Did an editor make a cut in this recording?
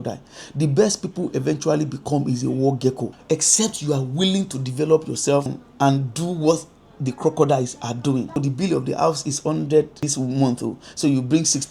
yes; 4 cuts; at 3.1 s, 5.6 s, 8.4 s, 10.0 s

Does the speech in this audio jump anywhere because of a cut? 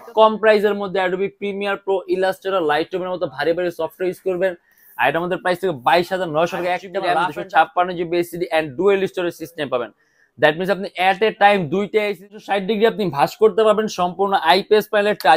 yes; 2 cuts; at 7.0 s, 12.2 s

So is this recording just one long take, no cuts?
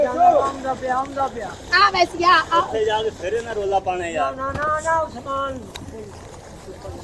yes; 0 cuts

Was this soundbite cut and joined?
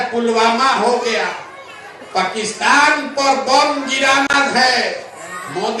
no; 0 cuts

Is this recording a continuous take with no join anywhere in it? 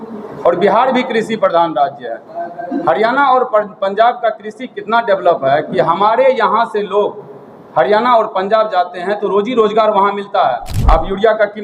no; 1 cut; at 10.7 s

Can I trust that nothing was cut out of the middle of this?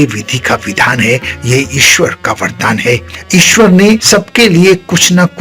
no; 1 cut; at 4.0 s

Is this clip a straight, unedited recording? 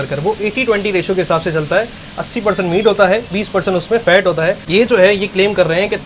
no; 1 cut; at 4.6 s

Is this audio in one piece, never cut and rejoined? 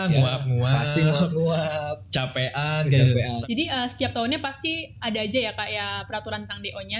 no; 1 cut; at 3.4 s

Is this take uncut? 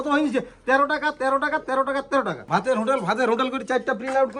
no; 1 cut; at 2.4 s

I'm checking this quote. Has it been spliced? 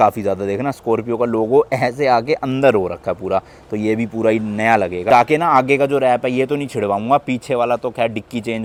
no; 0 cuts

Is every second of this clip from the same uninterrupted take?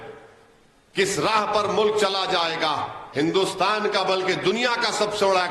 no; 1 cut; at 3.0 s

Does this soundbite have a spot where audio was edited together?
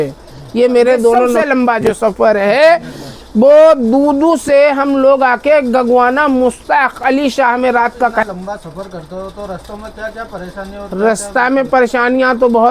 yes; 2 cuts; at 1.4 s, 8.2 s

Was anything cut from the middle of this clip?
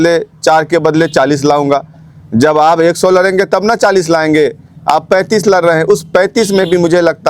no; 0 cuts

